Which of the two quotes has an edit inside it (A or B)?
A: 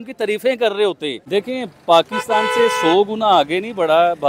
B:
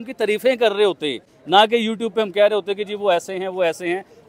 A